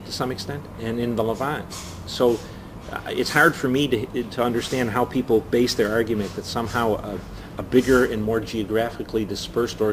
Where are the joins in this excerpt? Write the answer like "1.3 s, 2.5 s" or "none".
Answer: 4.7 s

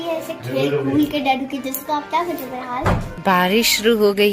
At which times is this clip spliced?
3.1 s

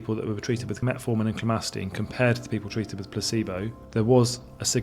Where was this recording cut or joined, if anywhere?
0.8 s, 3.8 s

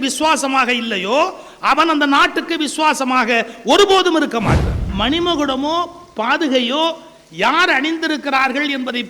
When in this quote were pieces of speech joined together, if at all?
4.8 s

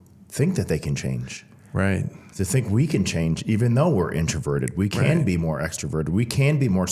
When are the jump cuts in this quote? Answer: none

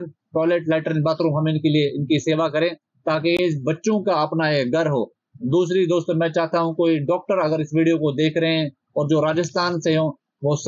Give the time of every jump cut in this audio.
none

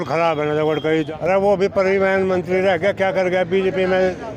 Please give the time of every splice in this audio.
1.1 s

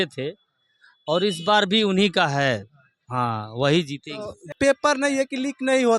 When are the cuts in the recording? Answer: 4.4 s

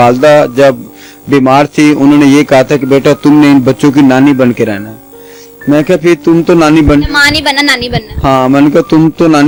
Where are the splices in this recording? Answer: none

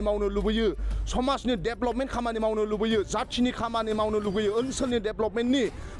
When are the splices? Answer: none

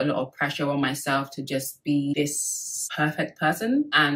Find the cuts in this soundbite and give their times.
none

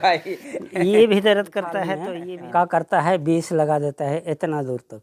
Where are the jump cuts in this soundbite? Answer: 2.0 s

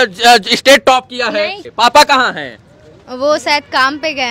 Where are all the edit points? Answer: 1.6 s

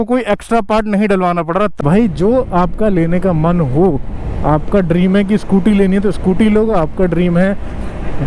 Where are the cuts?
1.8 s

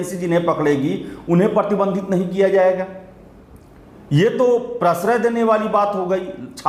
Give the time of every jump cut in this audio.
none

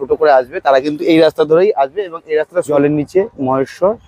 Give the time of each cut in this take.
2.7 s

